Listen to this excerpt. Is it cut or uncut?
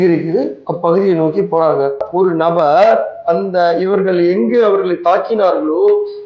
cut